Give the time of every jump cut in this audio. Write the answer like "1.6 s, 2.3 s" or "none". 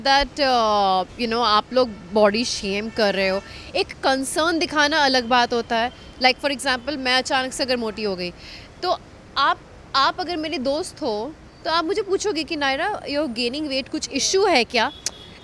none